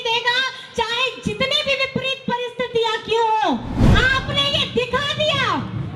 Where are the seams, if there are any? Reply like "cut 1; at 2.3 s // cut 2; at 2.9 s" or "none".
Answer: cut 1; at 3.8 s